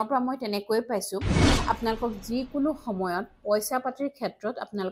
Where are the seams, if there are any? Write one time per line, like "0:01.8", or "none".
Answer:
0:01.6